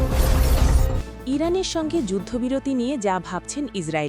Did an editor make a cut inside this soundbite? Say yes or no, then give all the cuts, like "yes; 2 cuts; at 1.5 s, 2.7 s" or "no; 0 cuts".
yes; 1 cut; at 1.1 s